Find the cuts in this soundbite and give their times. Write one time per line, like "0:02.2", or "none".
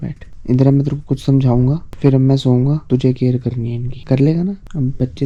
none